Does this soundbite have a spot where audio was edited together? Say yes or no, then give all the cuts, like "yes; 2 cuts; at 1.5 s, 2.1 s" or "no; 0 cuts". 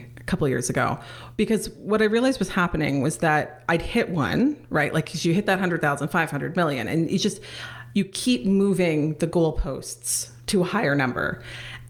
no; 0 cuts